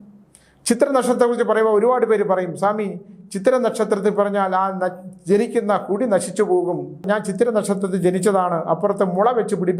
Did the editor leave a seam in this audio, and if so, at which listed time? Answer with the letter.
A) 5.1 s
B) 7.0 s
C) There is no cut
B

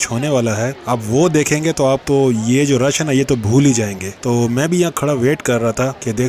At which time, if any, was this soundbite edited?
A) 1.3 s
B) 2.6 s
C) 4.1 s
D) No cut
D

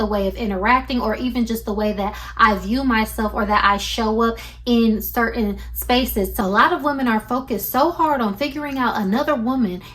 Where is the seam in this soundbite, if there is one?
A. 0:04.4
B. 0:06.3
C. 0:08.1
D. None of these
B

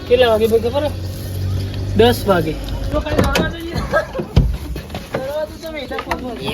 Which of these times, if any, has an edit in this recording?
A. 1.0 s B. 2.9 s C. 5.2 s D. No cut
B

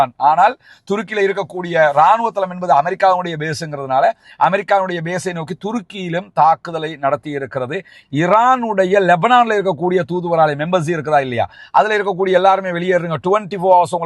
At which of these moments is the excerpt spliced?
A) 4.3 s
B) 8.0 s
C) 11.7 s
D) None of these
B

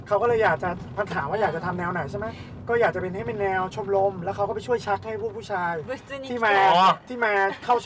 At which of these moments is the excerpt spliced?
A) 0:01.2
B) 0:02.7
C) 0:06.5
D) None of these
D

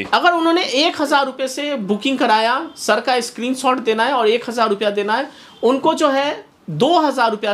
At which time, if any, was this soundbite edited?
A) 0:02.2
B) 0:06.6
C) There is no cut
C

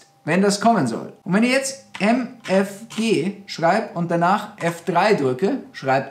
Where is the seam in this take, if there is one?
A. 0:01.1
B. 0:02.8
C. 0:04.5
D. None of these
A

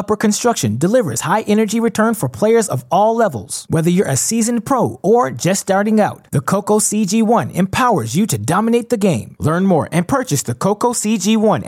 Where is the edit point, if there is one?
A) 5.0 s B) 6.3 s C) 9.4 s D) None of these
D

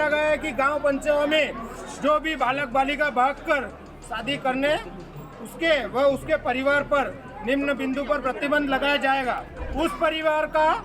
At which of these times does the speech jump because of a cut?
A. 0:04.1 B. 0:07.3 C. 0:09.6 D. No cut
C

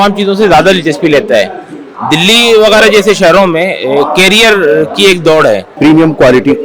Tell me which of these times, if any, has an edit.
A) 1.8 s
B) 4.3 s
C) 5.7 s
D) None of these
C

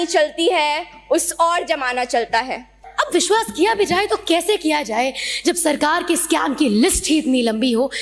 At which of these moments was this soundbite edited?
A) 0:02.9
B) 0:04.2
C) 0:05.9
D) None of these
A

